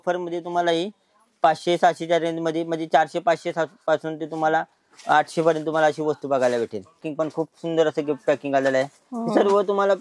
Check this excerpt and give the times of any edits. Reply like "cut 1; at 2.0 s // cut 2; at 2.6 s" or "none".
cut 1; at 7.1 s